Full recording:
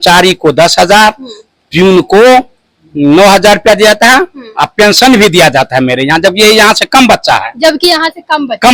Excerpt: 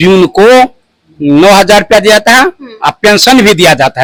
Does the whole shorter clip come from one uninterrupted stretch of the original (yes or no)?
yes